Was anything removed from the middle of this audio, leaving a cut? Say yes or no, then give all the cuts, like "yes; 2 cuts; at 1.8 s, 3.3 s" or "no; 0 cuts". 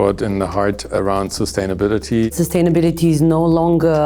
yes; 2 cuts; at 0.9 s, 2.3 s